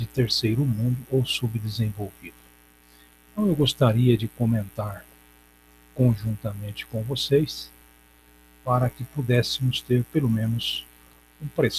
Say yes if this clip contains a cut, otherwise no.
no